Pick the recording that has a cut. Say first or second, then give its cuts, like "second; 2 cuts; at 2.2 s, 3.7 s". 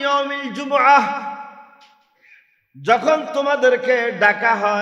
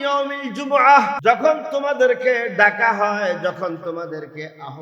second; 1 cut; at 1.2 s